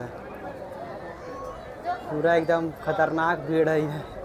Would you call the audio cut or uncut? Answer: uncut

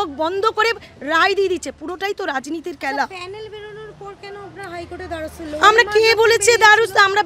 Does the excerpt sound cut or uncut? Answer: uncut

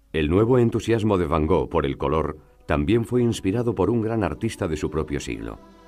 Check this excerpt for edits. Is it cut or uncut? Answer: uncut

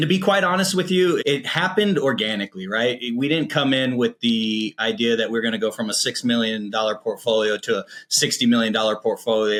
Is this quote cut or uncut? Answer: uncut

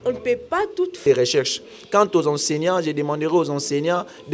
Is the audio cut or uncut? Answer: cut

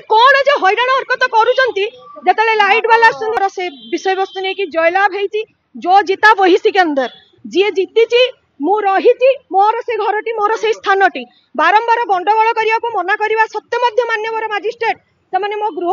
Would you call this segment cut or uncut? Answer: cut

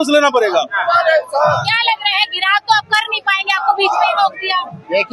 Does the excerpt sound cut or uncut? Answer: uncut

